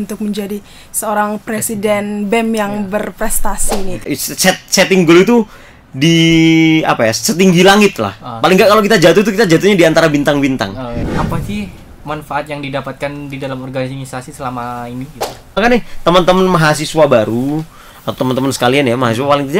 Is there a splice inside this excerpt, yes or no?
yes